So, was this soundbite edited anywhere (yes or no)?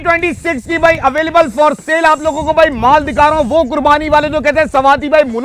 no